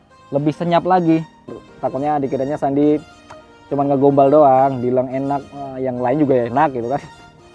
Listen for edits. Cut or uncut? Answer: cut